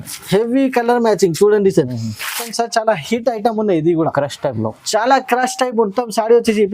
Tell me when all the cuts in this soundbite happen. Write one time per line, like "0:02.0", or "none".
0:02.5

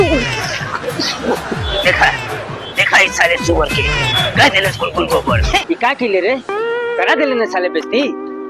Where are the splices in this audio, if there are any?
0:05.6

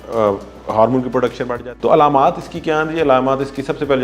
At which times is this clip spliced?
0:01.5

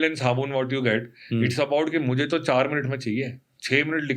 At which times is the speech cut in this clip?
none

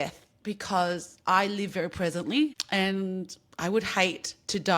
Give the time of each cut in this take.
0:02.6

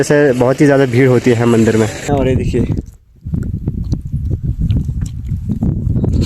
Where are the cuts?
0:02.1

